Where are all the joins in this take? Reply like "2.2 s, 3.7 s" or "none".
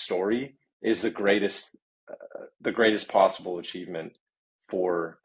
none

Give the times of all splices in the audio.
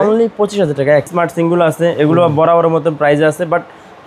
1.1 s

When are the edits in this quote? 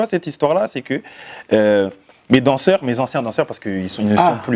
none

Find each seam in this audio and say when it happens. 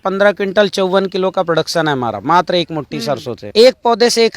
3.4 s

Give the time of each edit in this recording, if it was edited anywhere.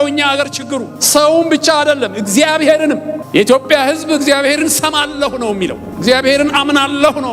1.0 s, 3.2 s, 5.9 s

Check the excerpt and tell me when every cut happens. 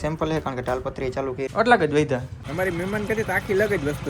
1.5 s, 2.4 s

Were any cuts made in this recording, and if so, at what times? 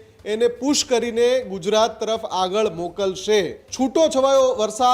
3.6 s

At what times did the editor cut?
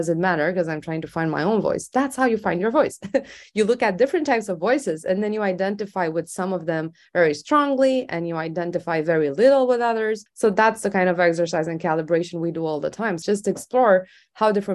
10.2 s, 13.2 s

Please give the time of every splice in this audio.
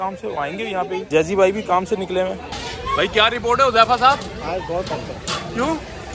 2.5 s

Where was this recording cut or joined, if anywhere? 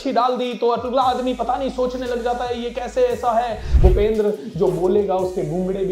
3.7 s

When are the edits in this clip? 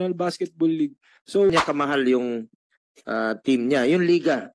1.5 s

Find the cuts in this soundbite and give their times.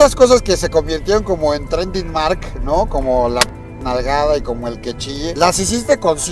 5.3 s

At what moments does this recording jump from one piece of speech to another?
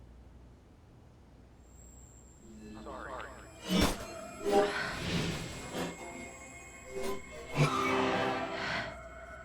2.4 s

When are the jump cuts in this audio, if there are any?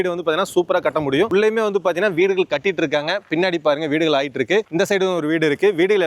none

